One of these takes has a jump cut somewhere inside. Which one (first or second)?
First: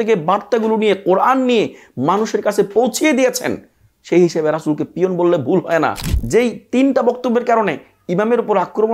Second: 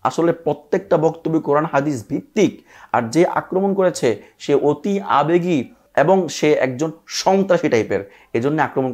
second